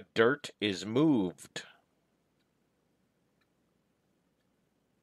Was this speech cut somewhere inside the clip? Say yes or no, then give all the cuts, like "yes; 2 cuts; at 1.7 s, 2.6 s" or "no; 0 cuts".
no; 0 cuts